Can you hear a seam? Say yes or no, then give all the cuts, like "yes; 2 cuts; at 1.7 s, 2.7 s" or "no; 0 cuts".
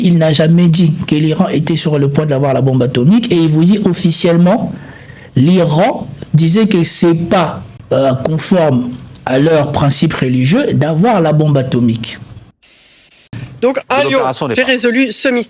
yes; 2 cuts; at 7.7 s, 13.0 s